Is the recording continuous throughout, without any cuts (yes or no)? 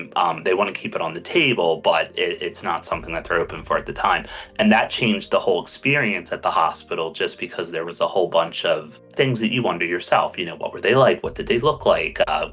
yes